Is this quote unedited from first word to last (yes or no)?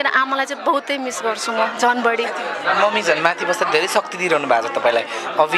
yes